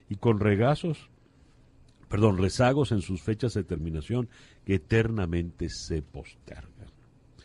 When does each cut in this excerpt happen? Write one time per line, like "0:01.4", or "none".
none